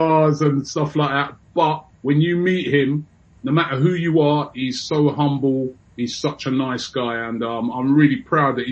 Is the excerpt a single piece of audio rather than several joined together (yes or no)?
no